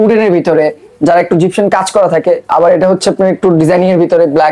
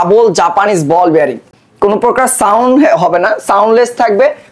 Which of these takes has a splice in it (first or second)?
second